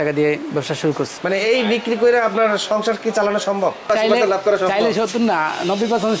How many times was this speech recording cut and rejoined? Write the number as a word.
two